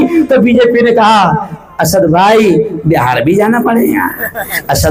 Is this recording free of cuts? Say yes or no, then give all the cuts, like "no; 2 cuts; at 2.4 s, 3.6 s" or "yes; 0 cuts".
yes; 0 cuts